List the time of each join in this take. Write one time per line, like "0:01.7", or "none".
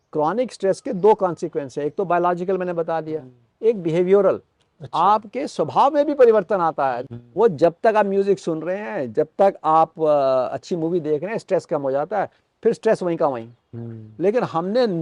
0:07.1